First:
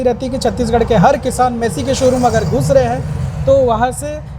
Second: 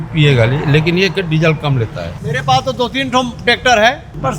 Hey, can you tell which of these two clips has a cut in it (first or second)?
second